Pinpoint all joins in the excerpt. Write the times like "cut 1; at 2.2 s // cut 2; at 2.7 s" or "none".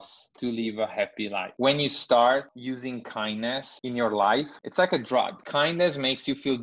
cut 1; at 1.5 s // cut 2; at 2.5 s // cut 3; at 3.7 s // cut 4; at 4.5 s // cut 5; at 5.4 s